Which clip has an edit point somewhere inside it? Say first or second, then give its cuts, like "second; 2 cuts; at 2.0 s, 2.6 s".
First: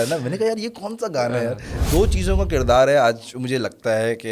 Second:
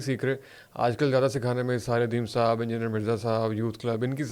first; 1 cut; at 1.7 s